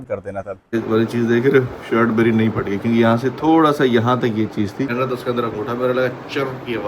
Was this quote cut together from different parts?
yes; 2 cuts; at 0.7 s, 4.9 s

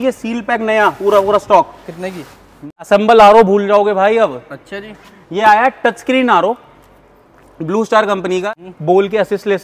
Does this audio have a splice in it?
yes; 2 cuts; at 2.6 s, 8.4 s

